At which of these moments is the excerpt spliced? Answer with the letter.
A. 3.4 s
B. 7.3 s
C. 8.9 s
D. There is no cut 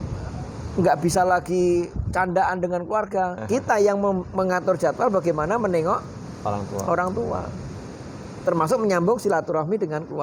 A